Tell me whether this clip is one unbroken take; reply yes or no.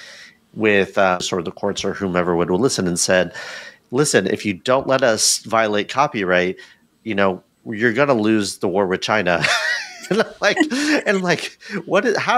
no